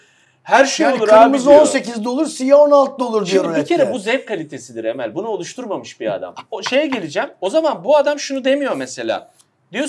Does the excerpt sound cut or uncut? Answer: uncut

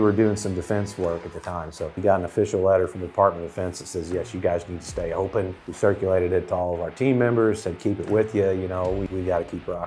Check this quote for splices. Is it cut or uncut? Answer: cut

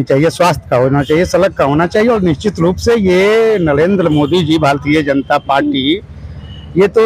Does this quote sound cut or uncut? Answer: uncut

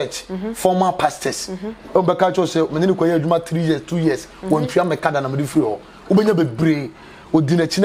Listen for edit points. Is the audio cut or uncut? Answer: uncut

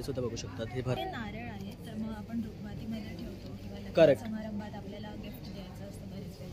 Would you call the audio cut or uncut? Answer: cut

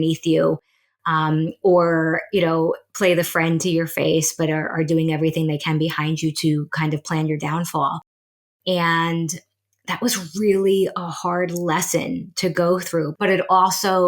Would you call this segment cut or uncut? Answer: cut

